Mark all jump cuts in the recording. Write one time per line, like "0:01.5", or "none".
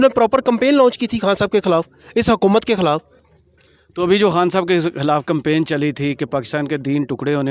none

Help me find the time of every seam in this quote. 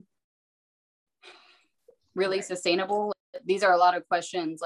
0:03.1

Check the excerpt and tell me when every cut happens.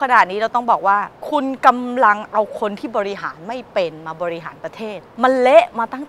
0:01.2
0:05.0

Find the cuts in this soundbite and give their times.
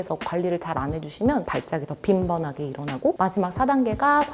0:01.4
0:03.1

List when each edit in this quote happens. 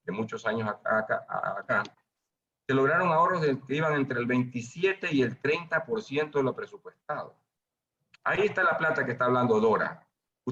none

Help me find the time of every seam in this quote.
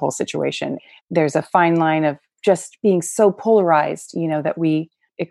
0:00.9
0:02.3

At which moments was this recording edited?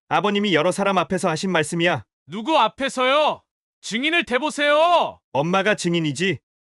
none

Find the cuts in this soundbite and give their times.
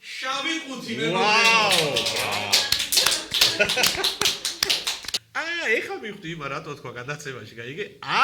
0:02.1
0:05.0

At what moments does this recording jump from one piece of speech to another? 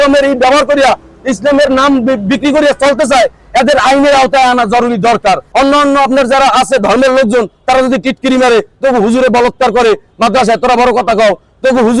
0:05.5

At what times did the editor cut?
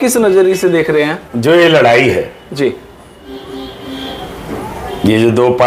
0:01.2

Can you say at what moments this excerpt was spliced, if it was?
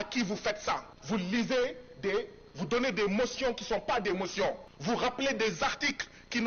0:00.9
0:04.7

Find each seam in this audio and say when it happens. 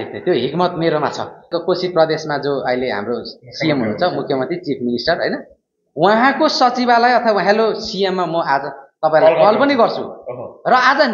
0:01.5

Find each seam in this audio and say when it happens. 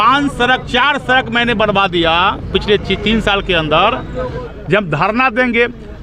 0:04.4

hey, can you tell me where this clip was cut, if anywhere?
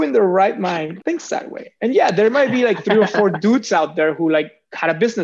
0:00.9

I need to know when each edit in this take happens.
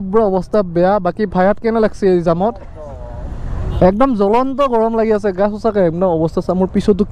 none

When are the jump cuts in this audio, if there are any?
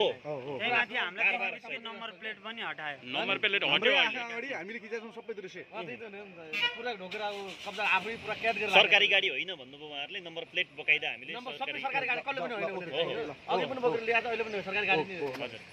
none

